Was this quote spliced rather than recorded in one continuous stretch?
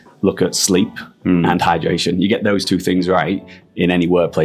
no; 0 cuts

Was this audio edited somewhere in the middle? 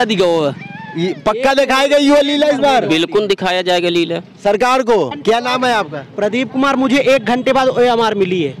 yes; 1 cut; at 5.2 s

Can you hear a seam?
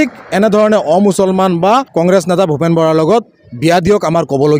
yes; 1 cut; at 1.9 s

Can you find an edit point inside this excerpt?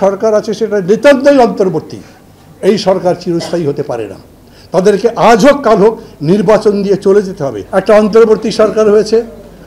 yes; 1 cut; at 7.5 s

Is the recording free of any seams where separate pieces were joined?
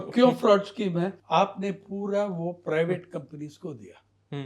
no; 1 cut; at 1.2 s

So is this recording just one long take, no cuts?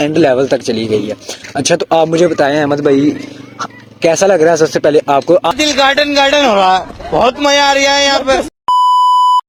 yes; 0 cuts

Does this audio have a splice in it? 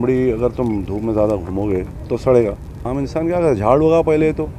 yes; 1 cut; at 2.7 s

